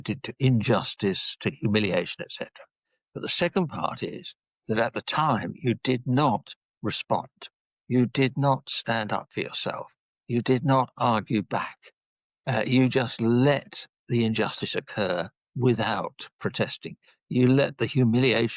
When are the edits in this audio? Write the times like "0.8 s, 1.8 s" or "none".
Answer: none